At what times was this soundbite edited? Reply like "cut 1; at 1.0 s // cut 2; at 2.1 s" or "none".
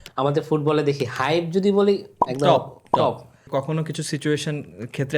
cut 1; at 3.4 s